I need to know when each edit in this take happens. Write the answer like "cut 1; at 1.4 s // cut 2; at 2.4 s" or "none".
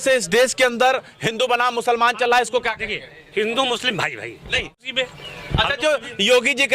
cut 1; at 4.8 s